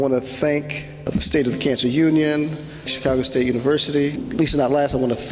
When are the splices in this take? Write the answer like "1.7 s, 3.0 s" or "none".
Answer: 1.1 s, 2.9 s, 4.2 s